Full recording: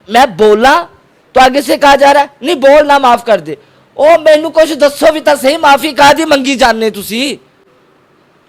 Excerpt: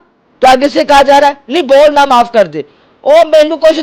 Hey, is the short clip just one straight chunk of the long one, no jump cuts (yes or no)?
yes